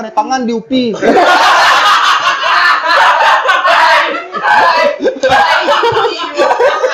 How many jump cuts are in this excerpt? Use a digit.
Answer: 0